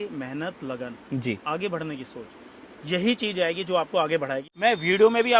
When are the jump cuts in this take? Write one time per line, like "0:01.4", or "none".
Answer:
0:04.4